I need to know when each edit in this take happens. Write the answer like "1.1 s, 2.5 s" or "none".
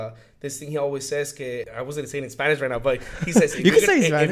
1.7 s